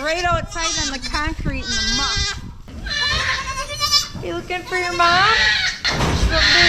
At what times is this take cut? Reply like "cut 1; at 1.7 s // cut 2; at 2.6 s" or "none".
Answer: cut 1; at 2.7 s // cut 2; at 5.8 s